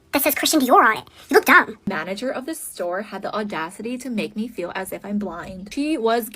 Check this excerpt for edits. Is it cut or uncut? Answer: cut